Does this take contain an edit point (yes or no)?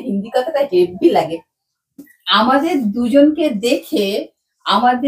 yes